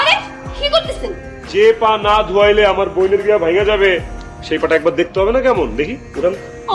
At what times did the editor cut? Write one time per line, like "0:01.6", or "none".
0:01.3

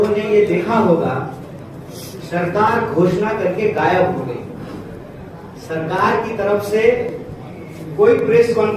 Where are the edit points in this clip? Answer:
none

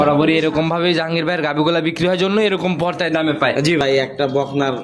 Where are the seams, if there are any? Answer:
0:03.8

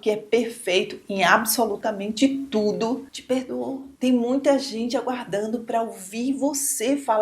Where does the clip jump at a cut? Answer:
none

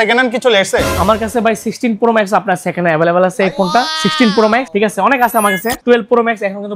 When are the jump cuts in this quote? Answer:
0:05.8

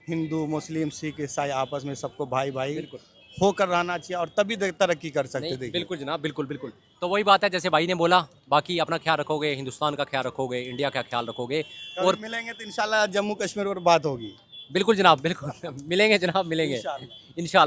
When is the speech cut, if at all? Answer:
none

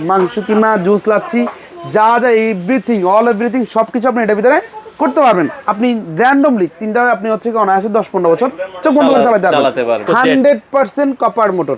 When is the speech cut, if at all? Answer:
0:05.6
0:10.0

